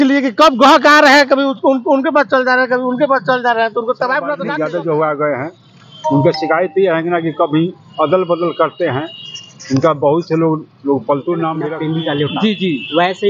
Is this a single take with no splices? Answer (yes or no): no